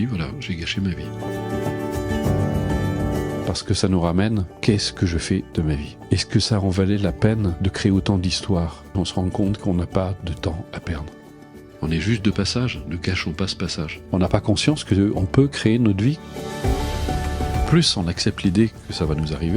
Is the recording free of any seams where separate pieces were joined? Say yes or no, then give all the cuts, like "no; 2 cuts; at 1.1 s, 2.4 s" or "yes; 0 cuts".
no; 1 cut; at 1.0 s